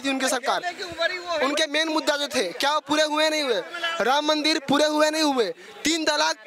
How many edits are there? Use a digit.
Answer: 0